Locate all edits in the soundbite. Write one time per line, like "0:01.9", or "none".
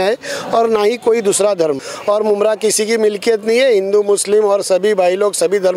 0:01.9